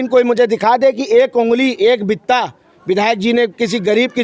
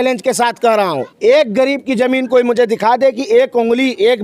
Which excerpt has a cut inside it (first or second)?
second